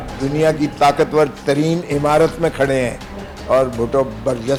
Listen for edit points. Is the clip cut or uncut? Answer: uncut